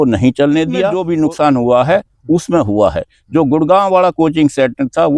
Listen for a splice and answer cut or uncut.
uncut